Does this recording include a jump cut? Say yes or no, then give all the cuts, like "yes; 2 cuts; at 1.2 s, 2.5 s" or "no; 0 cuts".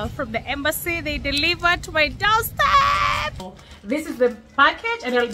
yes; 1 cut; at 3.6 s